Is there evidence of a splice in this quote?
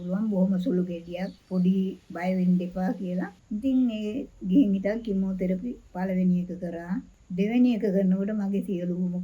yes; 1 cut; at 3.4 s

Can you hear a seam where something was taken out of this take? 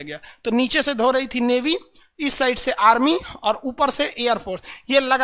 no; 0 cuts

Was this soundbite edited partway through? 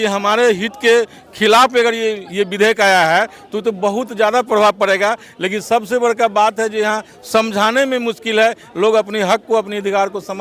no; 0 cuts

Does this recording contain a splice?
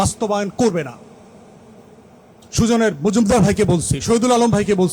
no; 0 cuts

